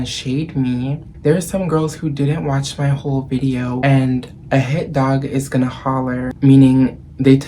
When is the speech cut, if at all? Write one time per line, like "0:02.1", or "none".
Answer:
0:03.8
0:06.3